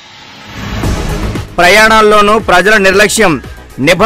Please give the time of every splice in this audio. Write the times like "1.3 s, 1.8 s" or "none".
1.4 s